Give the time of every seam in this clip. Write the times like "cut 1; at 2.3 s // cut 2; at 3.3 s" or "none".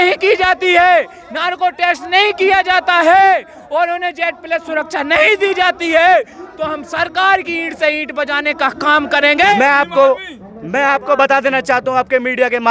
cut 1; at 9.6 s